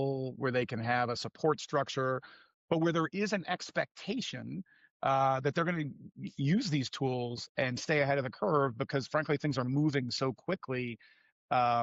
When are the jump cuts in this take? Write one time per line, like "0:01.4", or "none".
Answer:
none